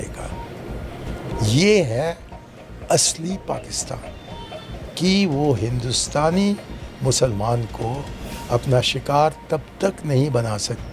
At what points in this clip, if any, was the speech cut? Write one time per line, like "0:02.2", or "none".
0:04.8